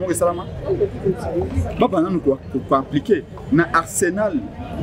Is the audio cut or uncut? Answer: uncut